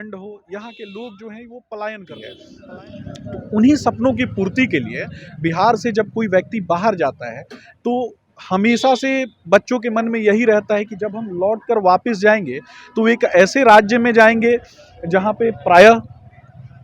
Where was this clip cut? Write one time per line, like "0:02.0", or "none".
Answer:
0:02.6